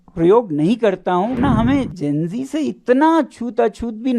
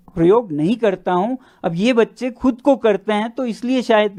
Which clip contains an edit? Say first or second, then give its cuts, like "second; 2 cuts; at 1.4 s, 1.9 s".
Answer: first; 1 cut; at 1.4 s